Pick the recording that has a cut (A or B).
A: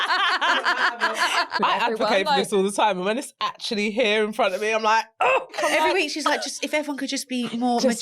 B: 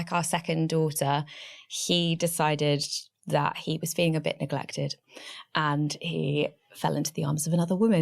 A